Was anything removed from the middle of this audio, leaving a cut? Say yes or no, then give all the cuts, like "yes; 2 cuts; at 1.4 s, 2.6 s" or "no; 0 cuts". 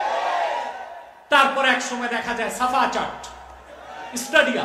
no; 0 cuts